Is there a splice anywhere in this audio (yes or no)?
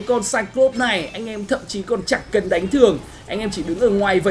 no